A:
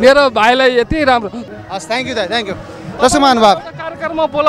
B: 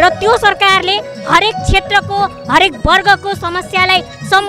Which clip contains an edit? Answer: A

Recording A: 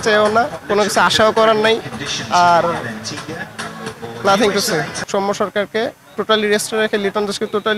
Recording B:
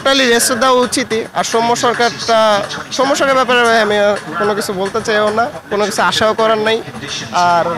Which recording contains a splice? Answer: A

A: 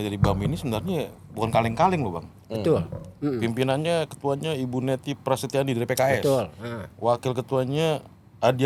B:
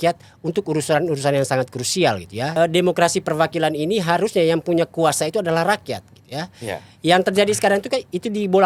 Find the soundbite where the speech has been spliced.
B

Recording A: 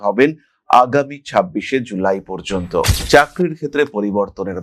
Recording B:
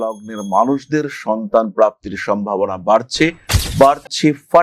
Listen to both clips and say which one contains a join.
A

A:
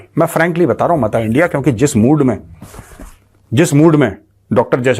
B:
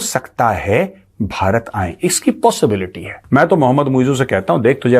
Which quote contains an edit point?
B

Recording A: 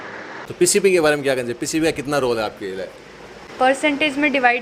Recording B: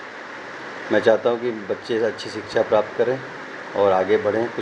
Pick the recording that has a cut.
A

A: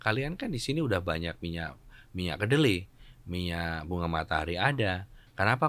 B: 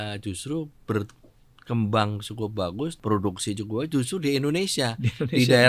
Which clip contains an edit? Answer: B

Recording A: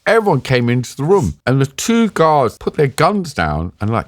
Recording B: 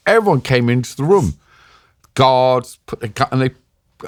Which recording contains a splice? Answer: A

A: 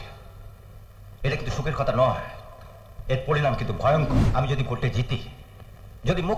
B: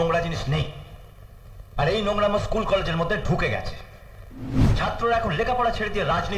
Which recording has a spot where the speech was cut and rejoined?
A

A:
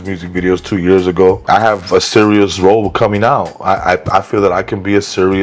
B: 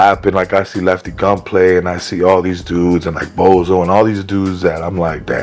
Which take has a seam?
A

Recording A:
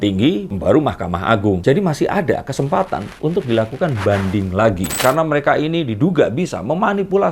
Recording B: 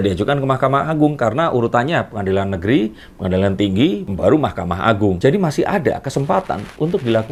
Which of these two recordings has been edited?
A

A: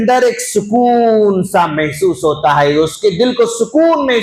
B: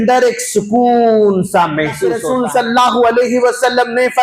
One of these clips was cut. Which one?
B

